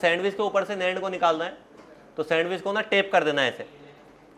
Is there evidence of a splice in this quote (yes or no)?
no